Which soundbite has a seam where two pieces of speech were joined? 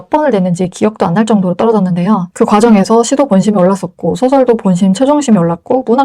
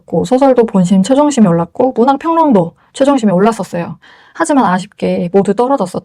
first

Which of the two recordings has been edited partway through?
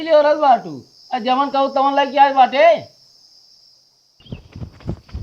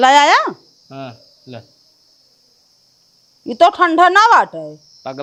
first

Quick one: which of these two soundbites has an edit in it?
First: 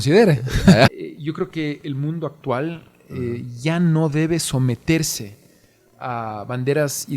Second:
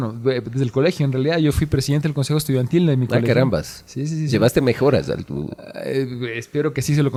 first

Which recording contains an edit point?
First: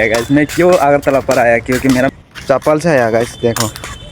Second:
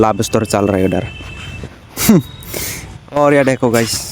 first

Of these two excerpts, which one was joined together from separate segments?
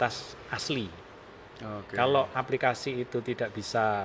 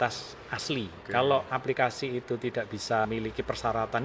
second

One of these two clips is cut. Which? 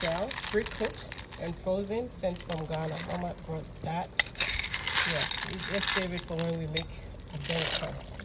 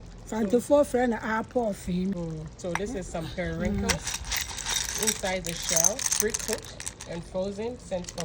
second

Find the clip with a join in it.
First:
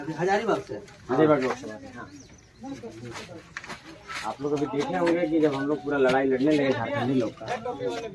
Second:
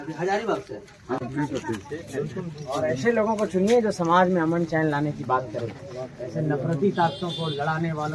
second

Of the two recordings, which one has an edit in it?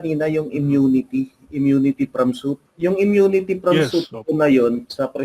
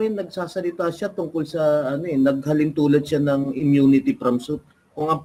first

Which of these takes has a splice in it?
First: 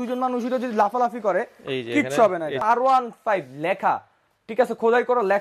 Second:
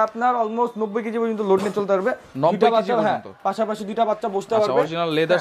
first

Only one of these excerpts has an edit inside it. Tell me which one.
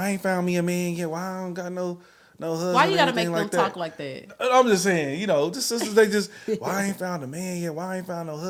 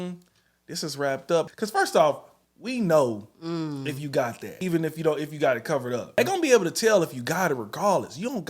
second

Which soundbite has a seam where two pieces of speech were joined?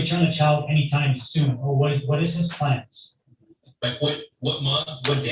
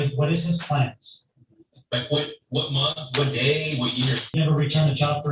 second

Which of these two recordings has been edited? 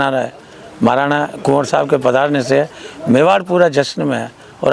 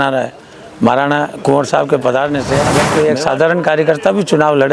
second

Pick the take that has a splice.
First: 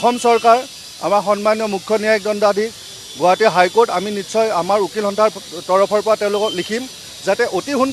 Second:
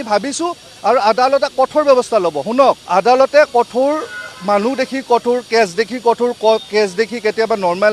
second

